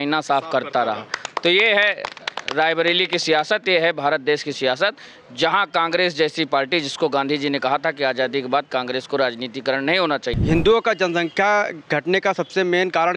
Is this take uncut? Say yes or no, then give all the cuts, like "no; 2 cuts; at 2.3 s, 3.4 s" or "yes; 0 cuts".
no; 1 cut; at 10.4 s